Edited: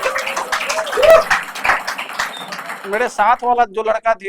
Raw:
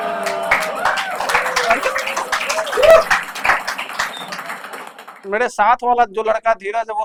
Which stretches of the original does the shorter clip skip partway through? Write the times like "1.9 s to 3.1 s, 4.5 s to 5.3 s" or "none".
4.6 s to 5.2 s